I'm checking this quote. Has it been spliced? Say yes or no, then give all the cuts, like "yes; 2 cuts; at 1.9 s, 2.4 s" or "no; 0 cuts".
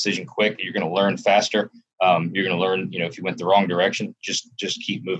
no; 0 cuts